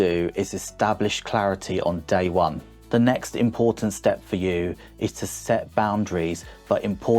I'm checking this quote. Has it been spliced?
yes; 1 cut; at 2.7 s

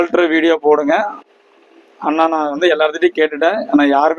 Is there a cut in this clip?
no; 0 cuts

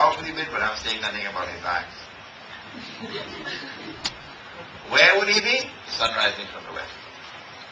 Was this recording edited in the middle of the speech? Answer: no; 0 cuts

